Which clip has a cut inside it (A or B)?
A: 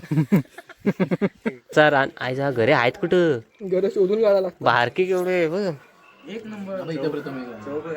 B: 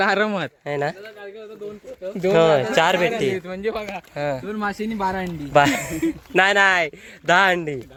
A